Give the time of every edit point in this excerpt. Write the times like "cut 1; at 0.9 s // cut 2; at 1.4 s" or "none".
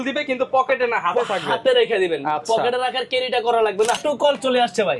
cut 1; at 4.0 s